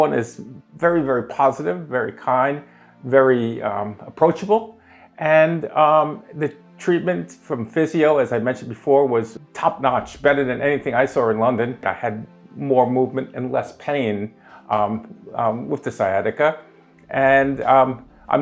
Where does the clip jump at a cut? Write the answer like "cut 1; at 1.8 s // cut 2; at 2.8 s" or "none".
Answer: cut 1; at 9.4 s // cut 2; at 11.8 s